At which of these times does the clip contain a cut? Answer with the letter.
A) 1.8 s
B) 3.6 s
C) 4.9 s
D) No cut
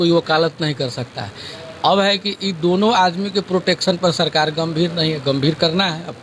D